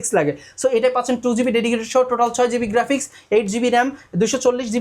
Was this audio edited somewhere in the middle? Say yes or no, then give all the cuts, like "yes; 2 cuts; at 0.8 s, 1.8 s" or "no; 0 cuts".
no; 0 cuts